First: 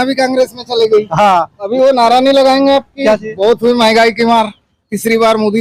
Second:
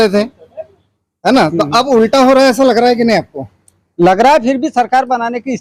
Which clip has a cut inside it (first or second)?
first